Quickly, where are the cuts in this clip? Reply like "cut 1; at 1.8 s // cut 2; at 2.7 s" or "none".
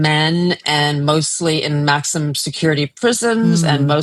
none